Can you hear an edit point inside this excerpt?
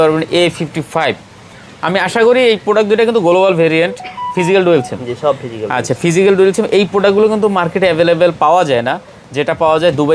no; 0 cuts

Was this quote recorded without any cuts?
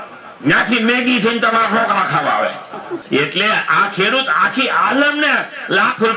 no; 1 cut; at 2.9 s

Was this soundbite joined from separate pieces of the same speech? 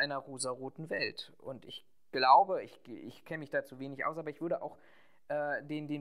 no; 0 cuts

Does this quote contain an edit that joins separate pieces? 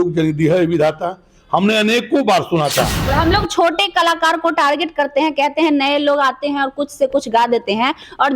yes; 1 cut; at 3.0 s

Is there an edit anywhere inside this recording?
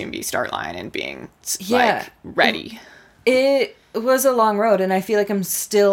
no; 0 cuts

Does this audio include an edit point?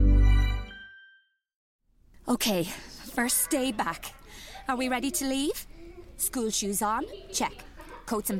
yes; 1 cut; at 1.6 s

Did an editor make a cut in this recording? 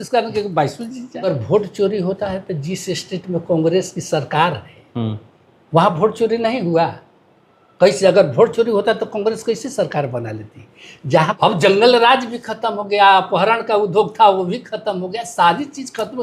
yes; 2 cuts; at 1.2 s, 11.4 s

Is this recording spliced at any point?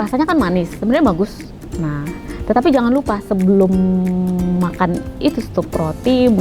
no; 0 cuts

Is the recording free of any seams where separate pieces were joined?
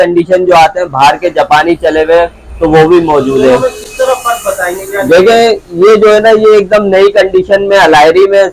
yes; 0 cuts

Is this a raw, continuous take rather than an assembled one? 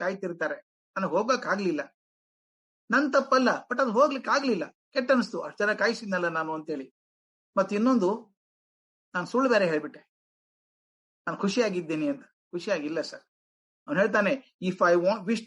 no; 1 cut; at 13.7 s

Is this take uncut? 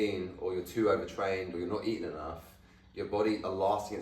yes; 0 cuts

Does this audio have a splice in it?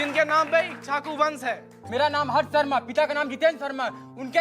yes; 1 cut; at 1.8 s

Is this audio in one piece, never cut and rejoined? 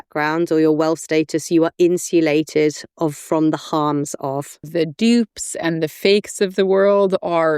no; 1 cut; at 4.7 s

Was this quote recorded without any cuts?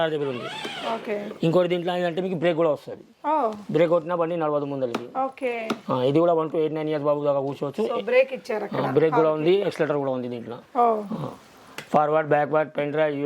yes; 0 cuts

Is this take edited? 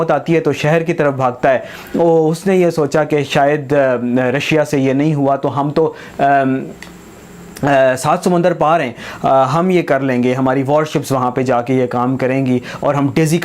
no; 0 cuts

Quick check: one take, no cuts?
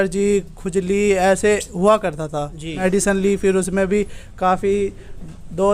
no; 1 cut; at 2.8 s

